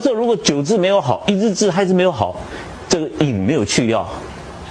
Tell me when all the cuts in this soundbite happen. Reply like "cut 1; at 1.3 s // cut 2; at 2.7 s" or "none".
none